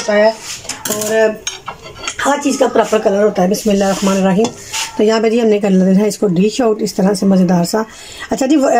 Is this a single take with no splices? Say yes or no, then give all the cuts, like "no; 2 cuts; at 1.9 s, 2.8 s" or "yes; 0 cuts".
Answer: yes; 0 cuts